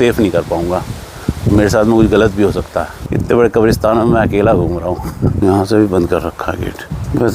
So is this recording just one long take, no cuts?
no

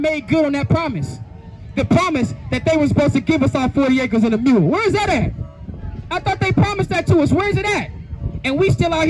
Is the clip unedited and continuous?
yes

